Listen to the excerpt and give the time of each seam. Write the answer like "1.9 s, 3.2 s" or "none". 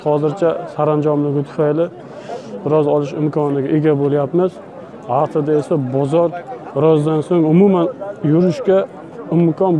none